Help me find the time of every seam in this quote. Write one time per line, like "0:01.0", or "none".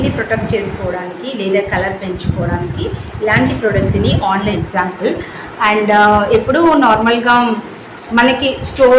0:04.6